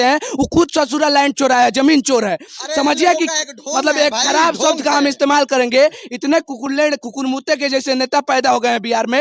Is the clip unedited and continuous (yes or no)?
yes